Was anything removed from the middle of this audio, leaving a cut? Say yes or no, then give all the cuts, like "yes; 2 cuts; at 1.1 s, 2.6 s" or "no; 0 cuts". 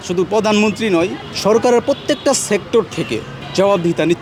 no; 0 cuts